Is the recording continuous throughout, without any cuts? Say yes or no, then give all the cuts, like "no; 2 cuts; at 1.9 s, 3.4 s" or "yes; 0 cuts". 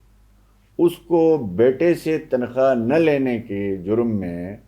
yes; 0 cuts